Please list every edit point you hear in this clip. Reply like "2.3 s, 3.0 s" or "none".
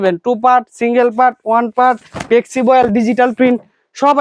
none